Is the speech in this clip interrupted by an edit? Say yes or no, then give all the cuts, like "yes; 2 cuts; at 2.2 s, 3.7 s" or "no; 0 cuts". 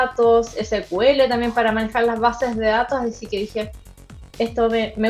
no; 0 cuts